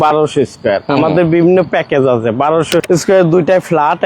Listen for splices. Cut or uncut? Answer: cut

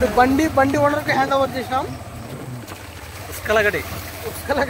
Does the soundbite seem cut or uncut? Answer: uncut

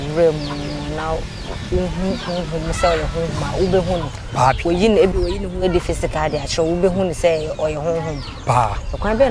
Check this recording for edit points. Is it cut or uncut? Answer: uncut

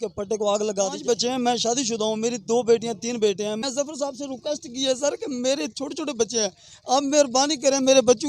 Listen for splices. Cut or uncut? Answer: cut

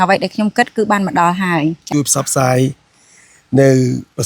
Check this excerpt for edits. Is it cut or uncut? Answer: cut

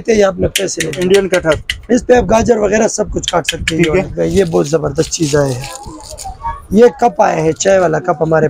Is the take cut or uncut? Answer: cut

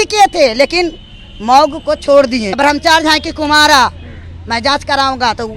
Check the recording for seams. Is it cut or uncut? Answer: cut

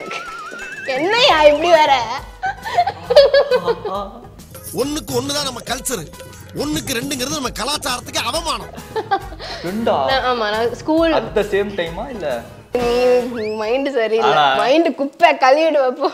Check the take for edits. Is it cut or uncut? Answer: cut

